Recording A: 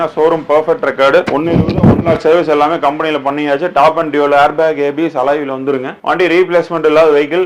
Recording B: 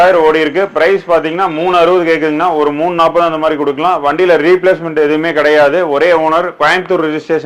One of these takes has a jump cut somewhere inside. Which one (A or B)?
A